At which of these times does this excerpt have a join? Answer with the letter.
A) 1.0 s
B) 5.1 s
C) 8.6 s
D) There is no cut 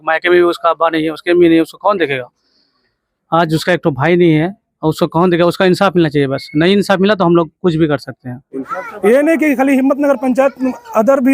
C